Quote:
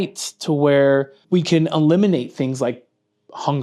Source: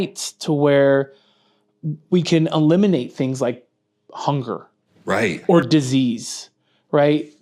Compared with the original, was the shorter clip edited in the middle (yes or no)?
yes